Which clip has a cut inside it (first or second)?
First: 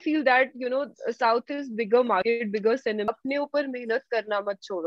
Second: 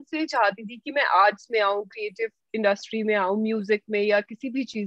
first